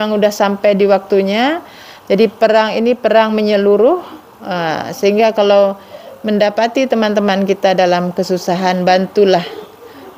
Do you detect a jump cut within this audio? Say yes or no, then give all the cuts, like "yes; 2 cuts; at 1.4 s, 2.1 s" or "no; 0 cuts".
no; 0 cuts